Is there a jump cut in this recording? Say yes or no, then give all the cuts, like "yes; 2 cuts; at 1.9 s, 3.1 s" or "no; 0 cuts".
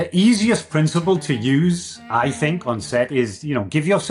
no; 0 cuts